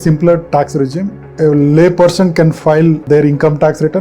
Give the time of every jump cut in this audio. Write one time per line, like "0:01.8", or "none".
0:01.2
0:03.0